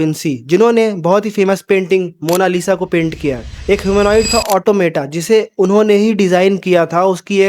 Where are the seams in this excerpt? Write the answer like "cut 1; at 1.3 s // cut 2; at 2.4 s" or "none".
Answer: cut 1; at 3.5 s